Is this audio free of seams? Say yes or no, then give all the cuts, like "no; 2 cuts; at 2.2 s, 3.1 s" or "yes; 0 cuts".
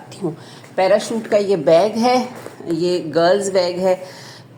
yes; 0 cuts